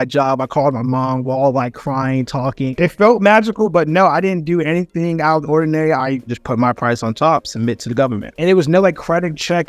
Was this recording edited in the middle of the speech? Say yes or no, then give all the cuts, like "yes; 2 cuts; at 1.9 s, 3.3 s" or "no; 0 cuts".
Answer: yes; 3 cuts; at 2.8 s, 6.3 s, 8.3 s